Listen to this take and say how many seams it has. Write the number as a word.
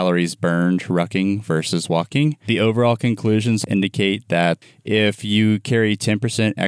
three